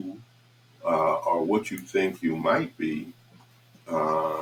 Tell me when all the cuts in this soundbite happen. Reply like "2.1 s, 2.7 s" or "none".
none